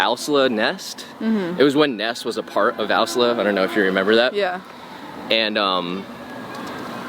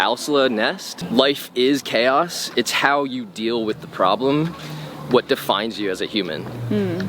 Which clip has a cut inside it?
second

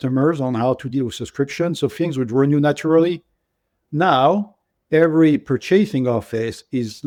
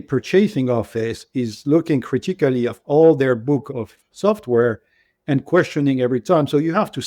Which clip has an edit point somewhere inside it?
second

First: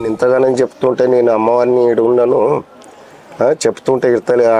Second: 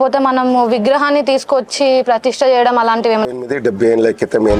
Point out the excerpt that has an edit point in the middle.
second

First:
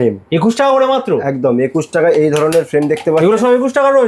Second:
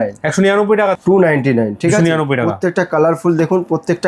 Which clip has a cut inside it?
second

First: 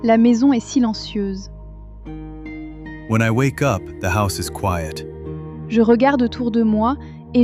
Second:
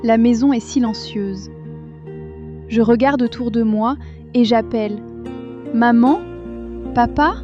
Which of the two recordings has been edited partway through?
second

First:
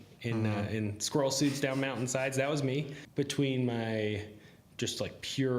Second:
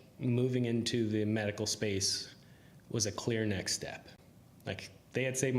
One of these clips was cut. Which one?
first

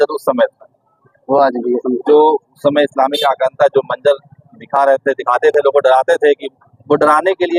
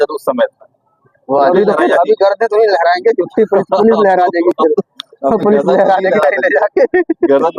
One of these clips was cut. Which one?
second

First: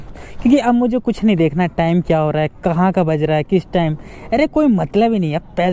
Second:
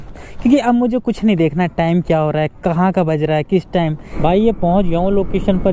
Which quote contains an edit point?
second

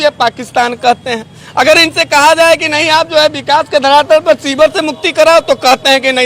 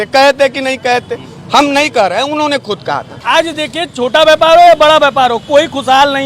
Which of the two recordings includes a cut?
second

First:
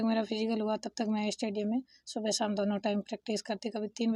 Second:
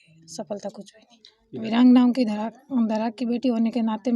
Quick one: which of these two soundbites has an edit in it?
second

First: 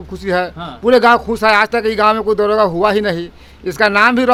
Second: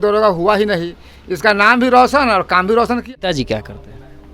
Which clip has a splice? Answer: second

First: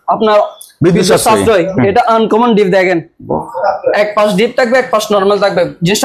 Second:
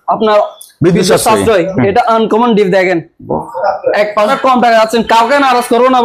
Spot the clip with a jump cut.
second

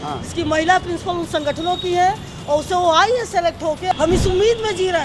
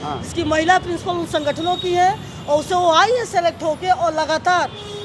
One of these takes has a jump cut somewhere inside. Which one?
first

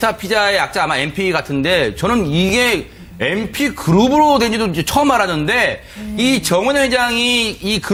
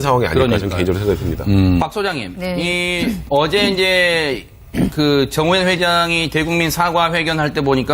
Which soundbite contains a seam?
second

